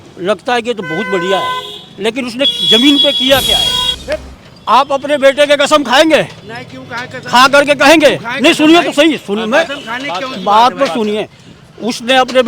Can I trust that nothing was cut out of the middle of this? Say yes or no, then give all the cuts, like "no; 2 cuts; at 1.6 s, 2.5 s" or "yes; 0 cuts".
no; 1 cut; at 3.9 s